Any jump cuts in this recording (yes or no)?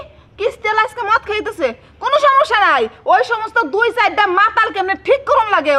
no